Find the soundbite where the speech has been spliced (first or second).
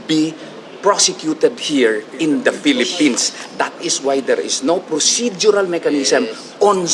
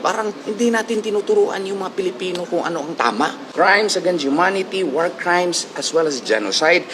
second